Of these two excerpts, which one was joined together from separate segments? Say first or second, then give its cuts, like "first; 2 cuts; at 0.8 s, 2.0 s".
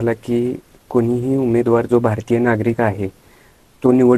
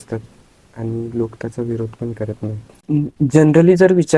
second; 1 cut; at 2.8 s